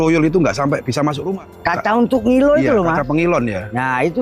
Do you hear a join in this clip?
yes; 1 cut; at 1.2 s

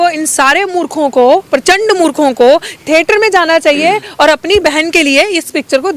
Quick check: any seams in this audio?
no; 0 cuts

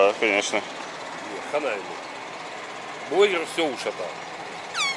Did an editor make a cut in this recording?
no; 0 cuts

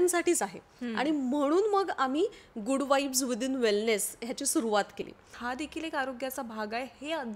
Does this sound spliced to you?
yes; 1 cut; at 5.4 s

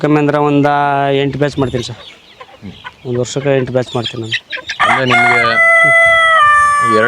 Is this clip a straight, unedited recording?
yes; 0 cuts

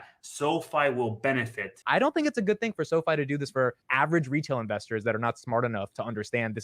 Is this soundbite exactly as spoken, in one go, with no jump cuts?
no; 1 cut; at 1.8 s

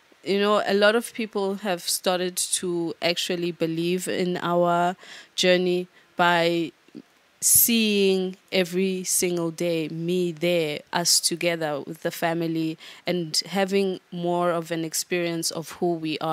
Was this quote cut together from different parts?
no; 0 cuts

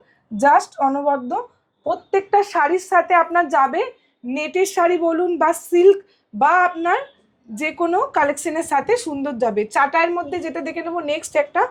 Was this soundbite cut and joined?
no; 0 cuts

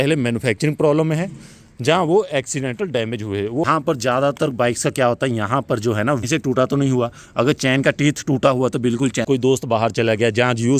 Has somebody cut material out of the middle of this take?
yes; 3 cuts; at 3.6 s, 6.2 s, 9.2 s

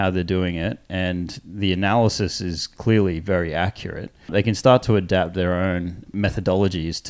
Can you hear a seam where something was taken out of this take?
yes; 3 cuts; at 2.7 s, 4.3 s, 6.1 s

